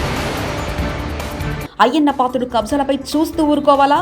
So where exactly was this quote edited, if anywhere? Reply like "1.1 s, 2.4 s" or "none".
1.4 s